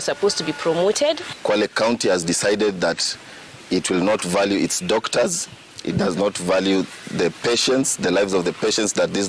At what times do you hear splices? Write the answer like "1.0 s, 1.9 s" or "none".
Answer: none